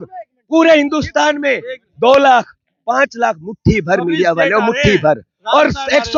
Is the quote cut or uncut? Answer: uncut